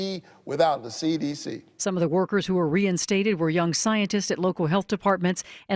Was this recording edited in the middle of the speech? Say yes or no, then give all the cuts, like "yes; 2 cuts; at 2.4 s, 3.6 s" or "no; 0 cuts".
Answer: yes; 1 cut; at 1.4 s